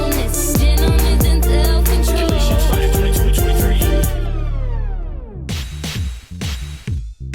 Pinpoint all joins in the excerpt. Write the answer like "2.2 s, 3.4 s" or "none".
5.4 s